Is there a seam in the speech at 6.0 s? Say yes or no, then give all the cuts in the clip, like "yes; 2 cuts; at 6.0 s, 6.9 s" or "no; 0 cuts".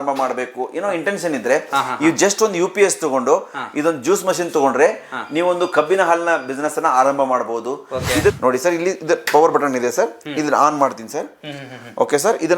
no; 1 cut; at 8.4 s